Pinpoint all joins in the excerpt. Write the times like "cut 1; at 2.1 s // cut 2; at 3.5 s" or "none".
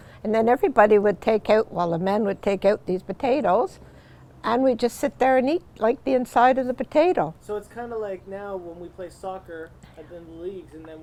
none